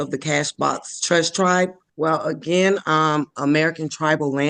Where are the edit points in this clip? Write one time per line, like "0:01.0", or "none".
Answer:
0:01.8